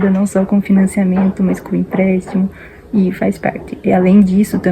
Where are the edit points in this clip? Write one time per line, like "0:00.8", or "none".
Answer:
none